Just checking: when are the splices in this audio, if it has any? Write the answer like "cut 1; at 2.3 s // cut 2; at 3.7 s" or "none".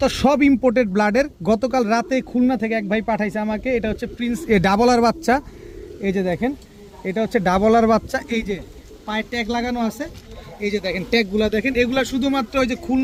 none